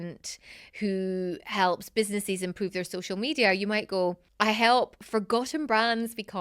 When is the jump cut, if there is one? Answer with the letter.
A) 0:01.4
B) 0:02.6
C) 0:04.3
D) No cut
C